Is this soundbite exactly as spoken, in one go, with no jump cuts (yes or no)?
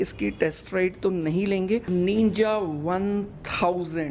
no